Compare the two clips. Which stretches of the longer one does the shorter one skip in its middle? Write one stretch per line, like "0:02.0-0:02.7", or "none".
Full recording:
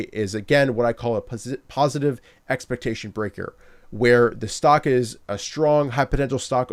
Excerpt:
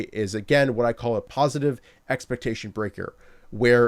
0:01.3-0:01.7